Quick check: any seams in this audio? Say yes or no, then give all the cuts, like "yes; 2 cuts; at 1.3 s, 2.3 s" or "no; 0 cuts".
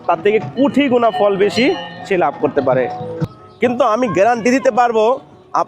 yes; 1 cut; at 3.2 s